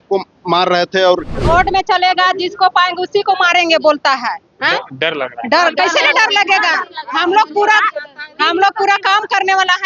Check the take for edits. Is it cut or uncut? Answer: cut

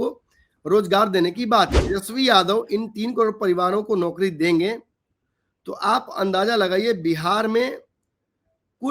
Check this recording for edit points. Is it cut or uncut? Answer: cut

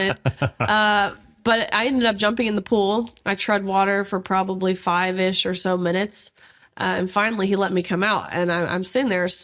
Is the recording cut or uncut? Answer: uncut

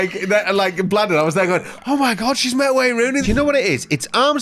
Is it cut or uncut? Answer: cut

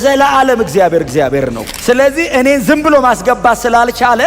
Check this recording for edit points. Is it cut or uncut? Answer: cut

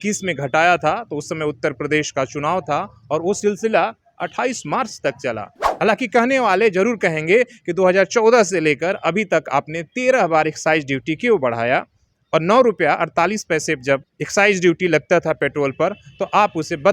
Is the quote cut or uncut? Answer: cut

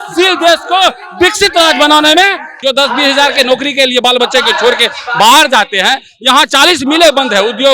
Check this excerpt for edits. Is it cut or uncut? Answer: cut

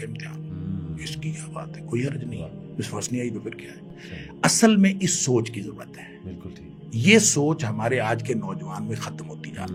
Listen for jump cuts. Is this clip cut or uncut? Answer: uncut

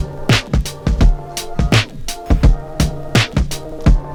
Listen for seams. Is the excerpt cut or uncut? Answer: uncut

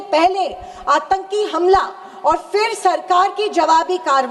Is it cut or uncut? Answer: uncut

